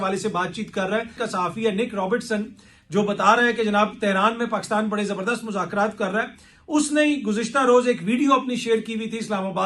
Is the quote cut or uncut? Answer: cut